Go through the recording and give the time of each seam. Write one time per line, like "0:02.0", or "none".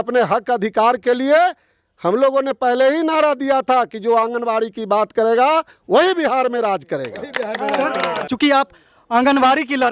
0:08.3